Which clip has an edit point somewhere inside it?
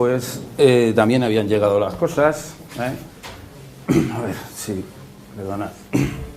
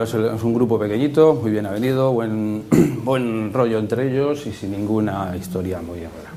first; 1 cut; at 1.2 s

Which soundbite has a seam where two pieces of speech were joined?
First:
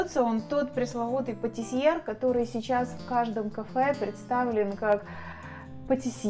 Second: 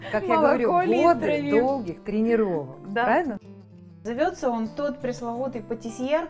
second; 1 cut; at 3.3 s

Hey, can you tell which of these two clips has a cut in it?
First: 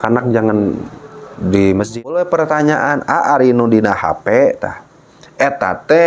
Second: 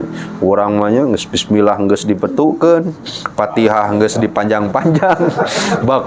first; 1 cut; at 2.1 s

